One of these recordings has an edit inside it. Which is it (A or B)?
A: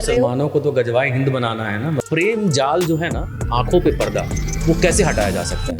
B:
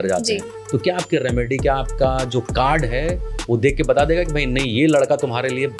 A